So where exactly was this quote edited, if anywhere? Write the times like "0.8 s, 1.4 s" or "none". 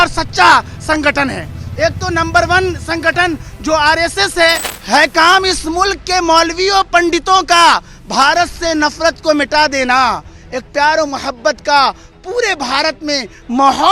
4.7 s